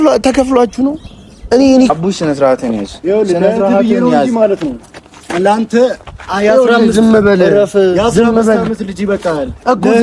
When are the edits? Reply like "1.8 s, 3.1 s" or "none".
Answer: 1.9 s